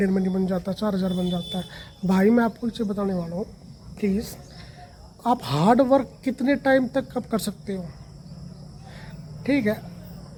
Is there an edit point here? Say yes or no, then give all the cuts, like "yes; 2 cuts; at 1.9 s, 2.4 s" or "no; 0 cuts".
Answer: no; 0 cuts